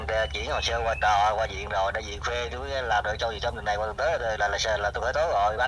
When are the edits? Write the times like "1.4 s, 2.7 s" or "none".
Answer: none